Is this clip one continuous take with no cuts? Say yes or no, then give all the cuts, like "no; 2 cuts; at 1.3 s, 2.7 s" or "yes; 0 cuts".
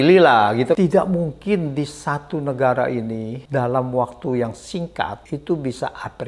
no; 3 cuts; at 0.8 s, 3.3 s, 5.2 s